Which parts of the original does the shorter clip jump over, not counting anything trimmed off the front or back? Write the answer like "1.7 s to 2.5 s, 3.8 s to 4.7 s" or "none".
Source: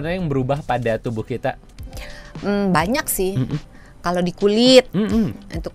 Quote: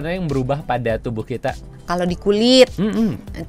1.7 s to 3.9 s